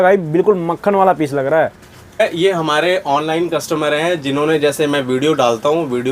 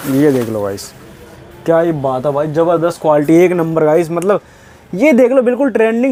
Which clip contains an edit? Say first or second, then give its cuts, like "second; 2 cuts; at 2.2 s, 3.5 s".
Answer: first; 1 cut; at 2.0 s